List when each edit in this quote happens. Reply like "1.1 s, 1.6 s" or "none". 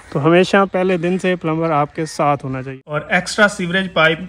2.7 s

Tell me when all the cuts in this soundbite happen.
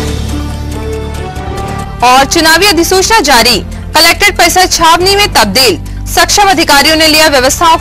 1.5 s

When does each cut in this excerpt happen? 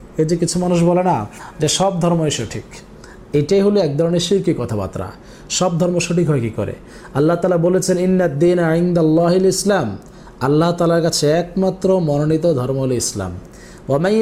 none

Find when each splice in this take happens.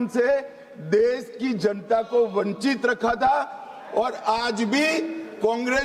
none

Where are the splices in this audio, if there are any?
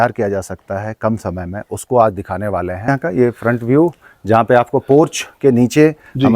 2.9 s

